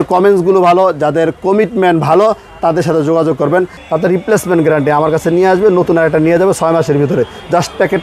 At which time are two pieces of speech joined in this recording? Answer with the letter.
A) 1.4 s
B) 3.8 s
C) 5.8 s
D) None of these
B